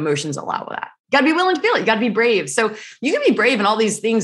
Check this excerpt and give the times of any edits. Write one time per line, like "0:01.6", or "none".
0:00.9

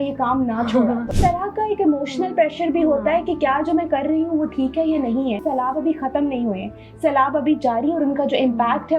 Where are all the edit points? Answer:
0:01.2
0:05.4

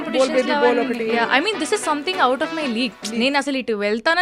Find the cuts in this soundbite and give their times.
none

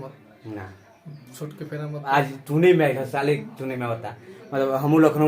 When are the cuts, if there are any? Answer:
0:02.0

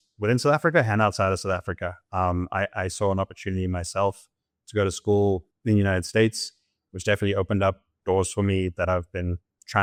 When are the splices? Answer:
none

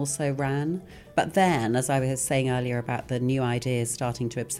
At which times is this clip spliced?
0:01.0

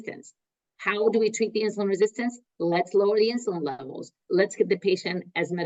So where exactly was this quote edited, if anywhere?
0:04.2

